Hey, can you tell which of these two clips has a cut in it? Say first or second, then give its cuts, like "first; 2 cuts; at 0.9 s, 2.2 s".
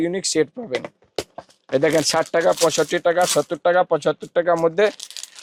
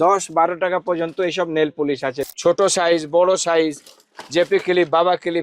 second; 1 cut; at 2.2 s